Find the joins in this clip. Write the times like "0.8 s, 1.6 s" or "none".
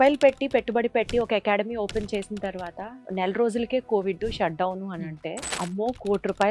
2.9 s, 5.5 s